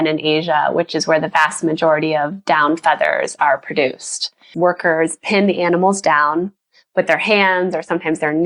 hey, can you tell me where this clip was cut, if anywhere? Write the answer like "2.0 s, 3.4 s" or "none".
4.5 s